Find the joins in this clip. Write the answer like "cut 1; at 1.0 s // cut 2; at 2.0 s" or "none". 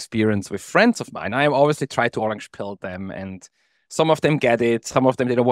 none